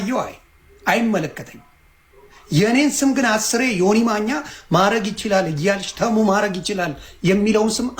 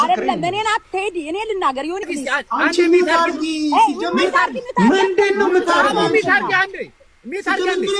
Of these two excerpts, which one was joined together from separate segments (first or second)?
second